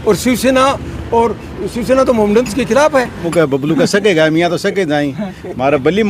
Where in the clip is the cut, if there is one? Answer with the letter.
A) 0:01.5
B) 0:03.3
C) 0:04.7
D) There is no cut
B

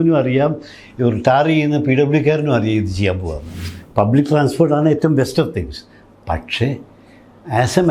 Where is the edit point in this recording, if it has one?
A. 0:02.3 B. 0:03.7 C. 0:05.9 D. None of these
B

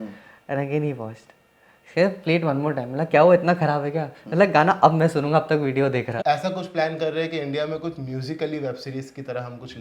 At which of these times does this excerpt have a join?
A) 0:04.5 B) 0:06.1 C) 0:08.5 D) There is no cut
B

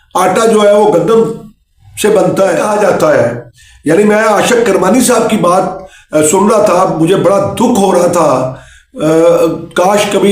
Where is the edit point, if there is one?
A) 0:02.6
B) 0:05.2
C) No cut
A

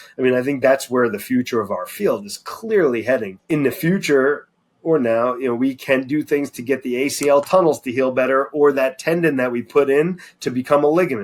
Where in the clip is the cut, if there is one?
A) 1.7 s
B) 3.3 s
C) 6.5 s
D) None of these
B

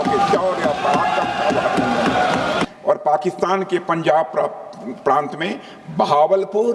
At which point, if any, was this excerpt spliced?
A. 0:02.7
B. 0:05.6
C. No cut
A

